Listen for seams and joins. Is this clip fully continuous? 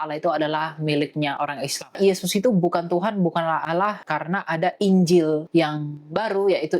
no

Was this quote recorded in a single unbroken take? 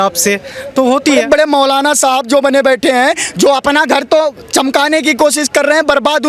no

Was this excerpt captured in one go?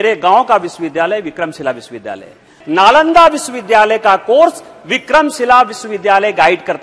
no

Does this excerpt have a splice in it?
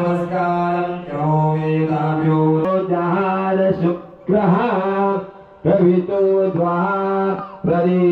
yes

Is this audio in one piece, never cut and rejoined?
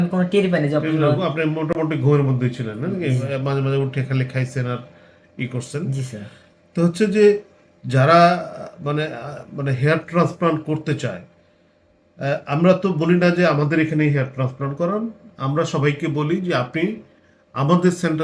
yes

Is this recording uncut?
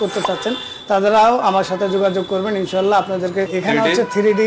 no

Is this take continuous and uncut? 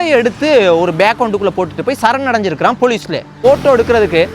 no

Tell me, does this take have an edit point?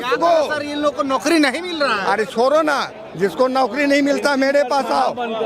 no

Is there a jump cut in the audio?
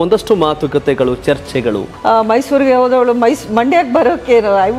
yes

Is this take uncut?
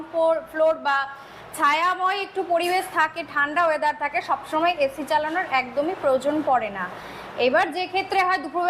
yes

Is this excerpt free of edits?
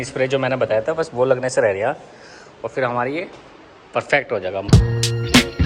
no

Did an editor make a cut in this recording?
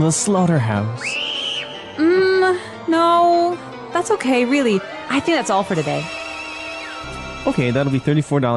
yes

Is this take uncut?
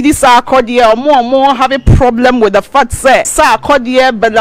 no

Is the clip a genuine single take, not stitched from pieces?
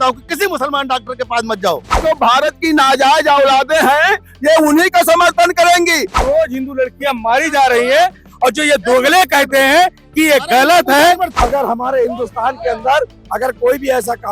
no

